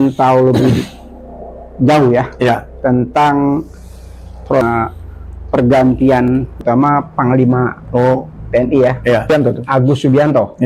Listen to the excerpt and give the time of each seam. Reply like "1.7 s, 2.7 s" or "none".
4.5 s, 6.6 s, 9.3 s

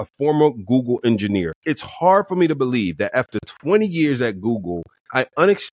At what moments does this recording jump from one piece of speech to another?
1.5 s

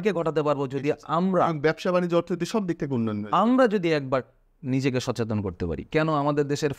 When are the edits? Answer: 5.9 s

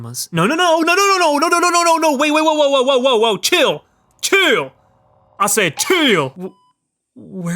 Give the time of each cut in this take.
6.4 s

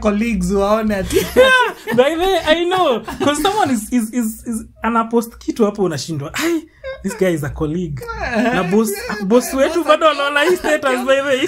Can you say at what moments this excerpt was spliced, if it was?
none

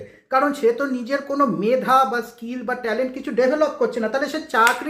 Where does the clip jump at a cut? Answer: none

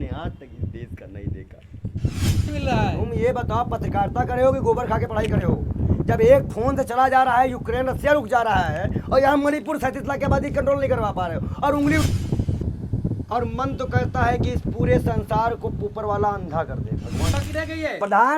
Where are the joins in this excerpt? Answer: 2.5 s, 12.0 s, 17.4 s

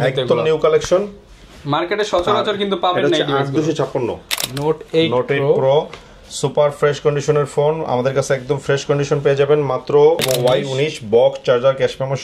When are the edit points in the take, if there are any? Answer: 4.3 s, 10.2 s

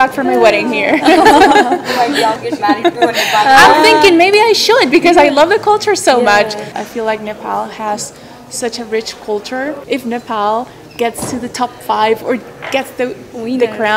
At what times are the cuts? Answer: 2.5 s, 6.7 s, 9.8 s

